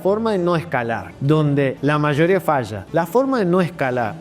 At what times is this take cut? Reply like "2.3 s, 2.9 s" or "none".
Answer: 1.1 s, 1.8 s, 2.8 s